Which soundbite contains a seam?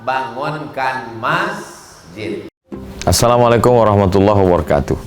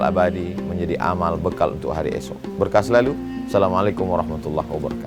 first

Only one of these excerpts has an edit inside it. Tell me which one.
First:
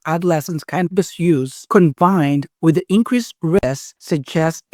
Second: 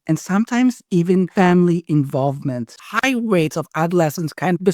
second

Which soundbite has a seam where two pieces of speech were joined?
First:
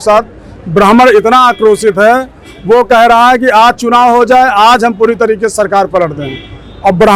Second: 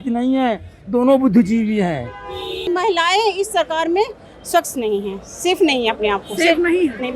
second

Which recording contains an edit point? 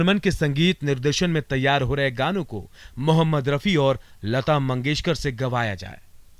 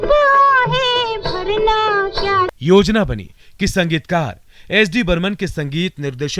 second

